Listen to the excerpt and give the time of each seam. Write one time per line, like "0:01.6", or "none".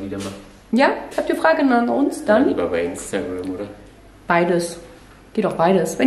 none